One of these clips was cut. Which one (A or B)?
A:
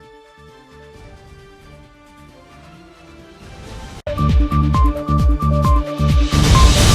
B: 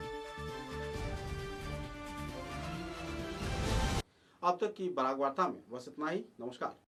A